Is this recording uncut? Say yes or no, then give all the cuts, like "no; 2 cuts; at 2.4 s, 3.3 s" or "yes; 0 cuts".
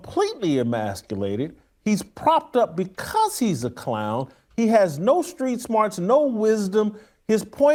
yes; 0 cuts